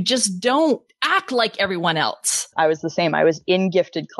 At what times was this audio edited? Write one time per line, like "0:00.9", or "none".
0:00.9
0:02.5